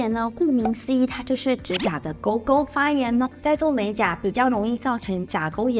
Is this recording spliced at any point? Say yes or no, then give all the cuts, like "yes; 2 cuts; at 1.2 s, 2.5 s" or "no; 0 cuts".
no; 0 cuts